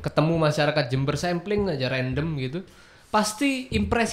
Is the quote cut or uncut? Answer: uncut